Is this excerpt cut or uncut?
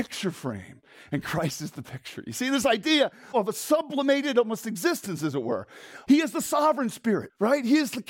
cut